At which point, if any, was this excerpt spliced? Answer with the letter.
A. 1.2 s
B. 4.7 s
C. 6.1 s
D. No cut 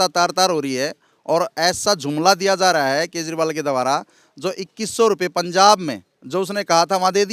D